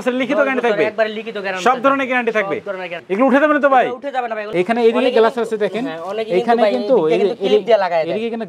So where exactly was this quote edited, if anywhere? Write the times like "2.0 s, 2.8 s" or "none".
3.0 s, 4.4 s